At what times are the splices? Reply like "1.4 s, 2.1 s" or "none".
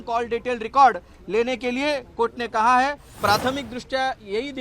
3.1 s